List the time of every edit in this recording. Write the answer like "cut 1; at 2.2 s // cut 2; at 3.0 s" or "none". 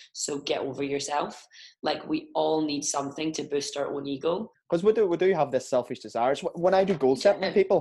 cut 1; at 4.5 s